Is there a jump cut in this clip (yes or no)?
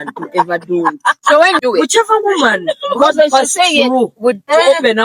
yes